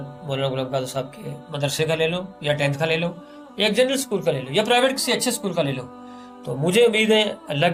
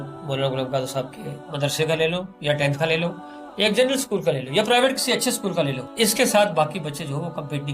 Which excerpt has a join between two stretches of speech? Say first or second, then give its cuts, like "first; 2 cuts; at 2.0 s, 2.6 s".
second; 1 cut; at 5.8 s